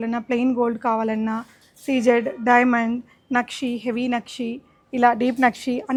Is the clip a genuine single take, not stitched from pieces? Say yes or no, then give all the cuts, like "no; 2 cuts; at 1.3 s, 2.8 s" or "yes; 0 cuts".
yes; 0 cuts